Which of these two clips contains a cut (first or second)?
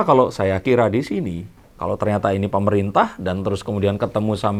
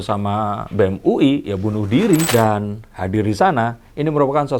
second